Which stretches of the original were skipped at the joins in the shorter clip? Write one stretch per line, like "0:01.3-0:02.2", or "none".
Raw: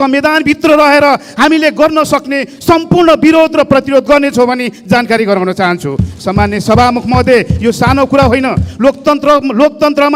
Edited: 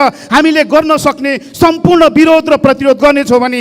none